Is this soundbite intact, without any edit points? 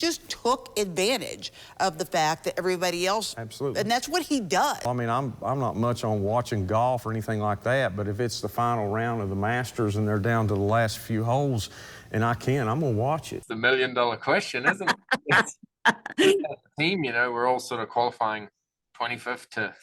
no; 2 cuts; at 4.8 s, 13.4 s

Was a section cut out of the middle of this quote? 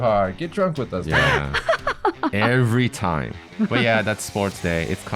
yes; 1 cut; at 3.5 s

